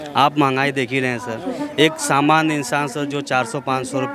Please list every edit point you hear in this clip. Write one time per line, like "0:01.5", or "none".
none